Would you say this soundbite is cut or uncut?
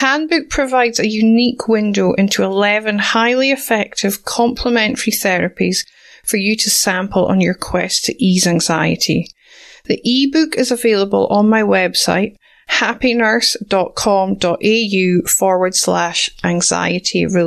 uncut